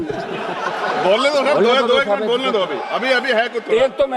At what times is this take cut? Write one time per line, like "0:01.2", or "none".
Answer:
none